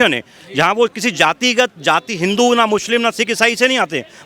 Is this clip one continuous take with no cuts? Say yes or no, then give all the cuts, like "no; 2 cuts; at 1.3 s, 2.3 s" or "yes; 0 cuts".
yes; 0 cuts